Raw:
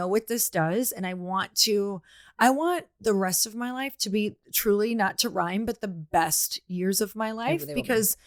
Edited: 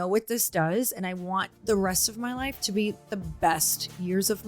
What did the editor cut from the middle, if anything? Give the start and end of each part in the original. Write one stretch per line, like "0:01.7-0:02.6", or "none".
0:01.5-0:02.9
0:04.5-0:05.8